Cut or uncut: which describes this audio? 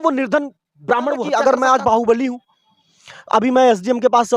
cut